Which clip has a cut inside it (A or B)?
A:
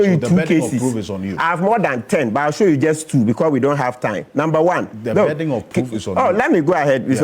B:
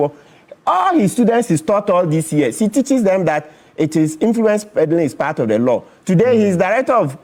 A